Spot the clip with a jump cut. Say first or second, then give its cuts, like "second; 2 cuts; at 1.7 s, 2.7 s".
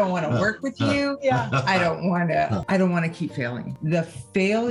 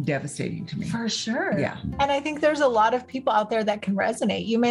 first; 2 cuts; at 2.6 s, 3.6 s